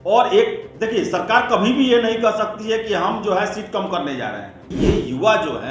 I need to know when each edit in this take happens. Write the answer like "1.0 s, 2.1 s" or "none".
4.7 s